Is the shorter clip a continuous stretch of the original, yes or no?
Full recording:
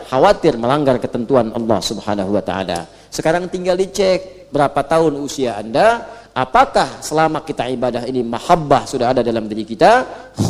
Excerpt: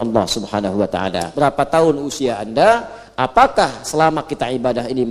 no